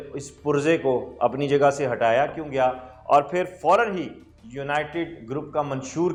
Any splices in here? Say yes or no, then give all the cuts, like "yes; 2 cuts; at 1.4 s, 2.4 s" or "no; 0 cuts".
no; 0 cuts